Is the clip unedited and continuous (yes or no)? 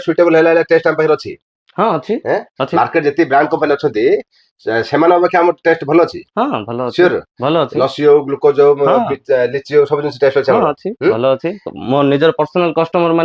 yes